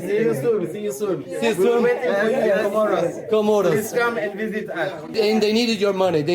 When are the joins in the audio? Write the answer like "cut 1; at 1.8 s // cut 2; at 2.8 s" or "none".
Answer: none